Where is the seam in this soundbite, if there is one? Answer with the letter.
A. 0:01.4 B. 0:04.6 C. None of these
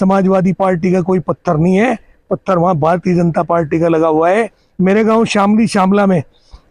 B